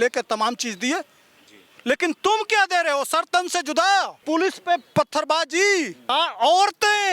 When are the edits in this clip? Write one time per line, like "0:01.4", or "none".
0:04.2
0:06.0